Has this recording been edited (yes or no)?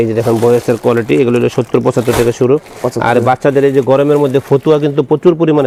no